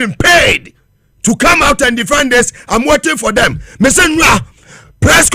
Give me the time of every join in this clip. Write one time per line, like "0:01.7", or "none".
none